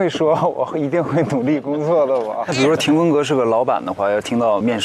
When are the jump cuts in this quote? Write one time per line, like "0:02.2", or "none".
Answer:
0:02.5